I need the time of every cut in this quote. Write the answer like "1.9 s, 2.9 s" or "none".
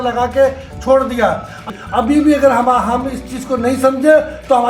1.6 s